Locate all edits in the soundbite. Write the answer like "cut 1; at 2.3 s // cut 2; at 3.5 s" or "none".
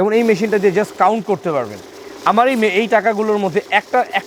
none